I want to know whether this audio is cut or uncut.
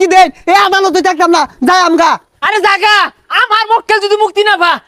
uncut